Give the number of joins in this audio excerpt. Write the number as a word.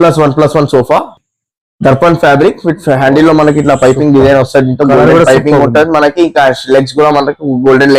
one